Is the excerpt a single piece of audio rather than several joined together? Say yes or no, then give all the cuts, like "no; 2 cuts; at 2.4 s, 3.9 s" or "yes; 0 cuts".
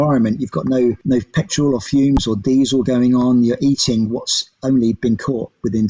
no; 1 cut; at 1.0 s